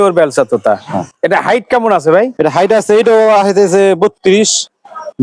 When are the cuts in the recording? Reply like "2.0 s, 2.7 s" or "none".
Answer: none